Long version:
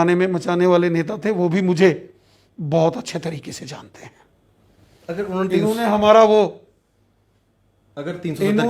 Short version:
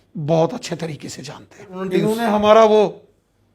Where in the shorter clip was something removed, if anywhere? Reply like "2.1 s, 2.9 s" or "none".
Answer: 1.8 s